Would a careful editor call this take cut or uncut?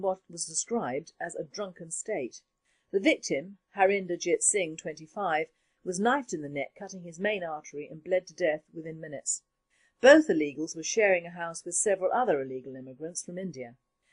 uncut